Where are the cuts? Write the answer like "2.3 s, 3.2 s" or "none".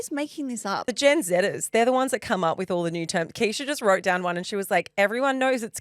0.9 s